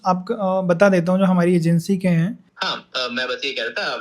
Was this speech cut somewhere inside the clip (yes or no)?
yes